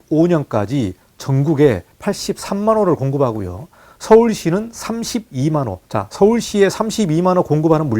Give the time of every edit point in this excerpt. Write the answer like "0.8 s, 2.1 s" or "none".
1.9 s, 5.8 s